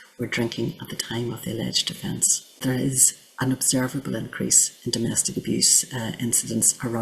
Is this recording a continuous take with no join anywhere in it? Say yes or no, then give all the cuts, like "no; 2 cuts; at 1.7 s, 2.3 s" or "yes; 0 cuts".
no; 1 cut; at 2.6 s